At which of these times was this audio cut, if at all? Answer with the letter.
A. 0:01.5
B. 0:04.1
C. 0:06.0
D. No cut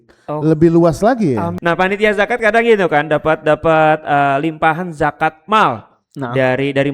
A